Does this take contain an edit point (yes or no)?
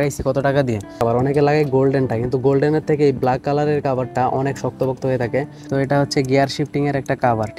yes